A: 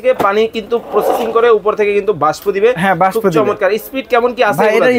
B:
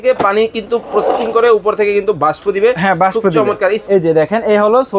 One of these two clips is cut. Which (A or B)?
B